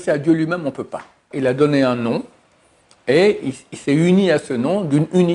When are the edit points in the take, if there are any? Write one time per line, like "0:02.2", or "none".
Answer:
0:01.3